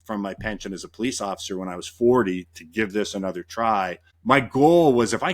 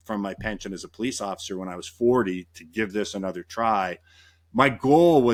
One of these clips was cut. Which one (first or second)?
first